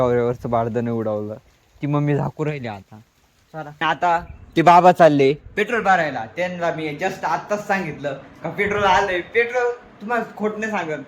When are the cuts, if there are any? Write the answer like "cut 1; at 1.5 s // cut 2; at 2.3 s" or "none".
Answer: cut 1; at 3.7 s